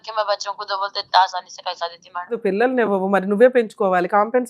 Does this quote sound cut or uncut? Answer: cut